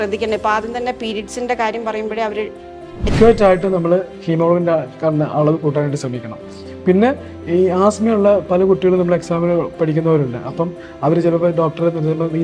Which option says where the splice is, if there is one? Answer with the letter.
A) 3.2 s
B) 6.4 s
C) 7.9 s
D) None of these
A